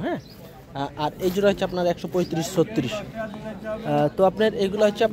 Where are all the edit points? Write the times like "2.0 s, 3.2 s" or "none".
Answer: none